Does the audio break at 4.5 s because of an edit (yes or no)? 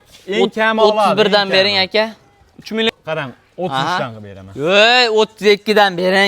no